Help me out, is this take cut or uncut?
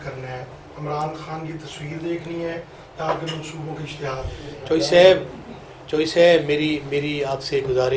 uncut